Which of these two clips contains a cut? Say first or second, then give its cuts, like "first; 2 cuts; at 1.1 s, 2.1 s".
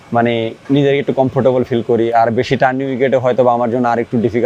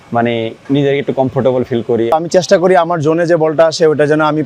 second; 1 cut; at 2.1 s